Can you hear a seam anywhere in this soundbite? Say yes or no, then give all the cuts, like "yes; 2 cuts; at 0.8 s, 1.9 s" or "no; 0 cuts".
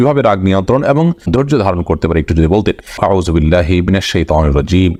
no; 0 cuts